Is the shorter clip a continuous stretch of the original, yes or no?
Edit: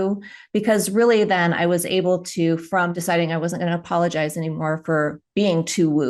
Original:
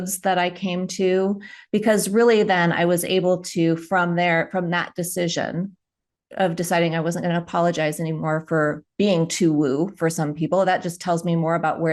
no